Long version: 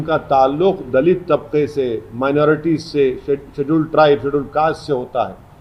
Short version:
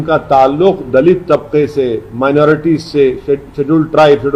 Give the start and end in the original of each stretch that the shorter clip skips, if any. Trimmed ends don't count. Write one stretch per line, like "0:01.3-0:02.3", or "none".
none